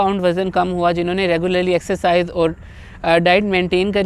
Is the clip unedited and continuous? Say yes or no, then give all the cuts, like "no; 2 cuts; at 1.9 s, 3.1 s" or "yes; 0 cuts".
yes; 0 cuts